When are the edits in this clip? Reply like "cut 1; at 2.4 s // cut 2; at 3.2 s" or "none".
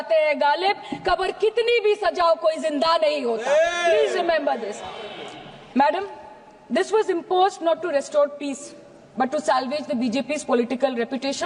none